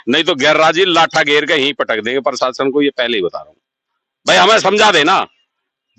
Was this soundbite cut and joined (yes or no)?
no